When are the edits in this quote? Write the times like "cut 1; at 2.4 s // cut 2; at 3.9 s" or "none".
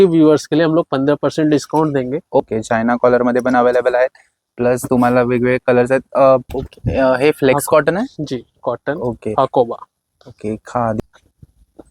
cut 1; at 2.4 s // cut 2; at 6.5 s // cut 3; at 11.0 s